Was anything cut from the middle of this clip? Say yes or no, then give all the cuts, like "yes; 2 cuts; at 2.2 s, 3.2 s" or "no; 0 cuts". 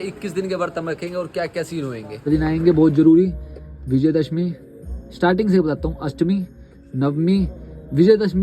yes; 1 cut; at 2.2 s